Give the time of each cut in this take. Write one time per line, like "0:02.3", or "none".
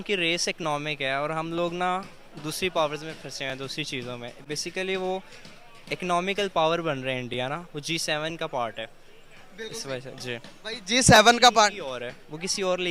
none